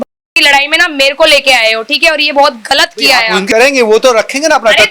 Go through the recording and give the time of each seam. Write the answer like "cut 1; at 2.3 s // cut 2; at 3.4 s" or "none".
cut 1; at 3.4 s